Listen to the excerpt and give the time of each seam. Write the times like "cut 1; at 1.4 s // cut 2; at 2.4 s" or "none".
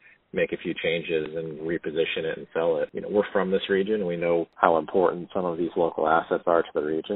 cut 1; at 3.0 s // cut 2; at 4.5 s